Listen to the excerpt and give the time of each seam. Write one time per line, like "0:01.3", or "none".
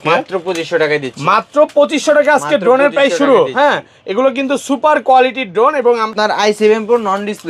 0:06.1